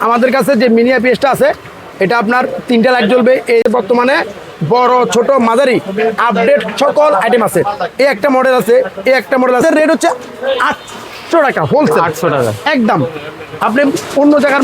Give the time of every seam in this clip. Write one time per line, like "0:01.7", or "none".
0:03.6
0:09.6